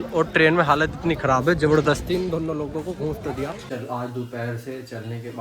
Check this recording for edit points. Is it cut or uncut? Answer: cut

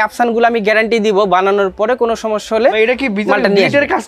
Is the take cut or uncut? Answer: uncut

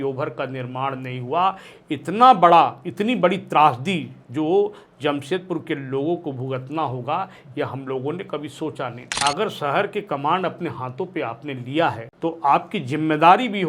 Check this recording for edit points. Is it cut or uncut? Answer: cut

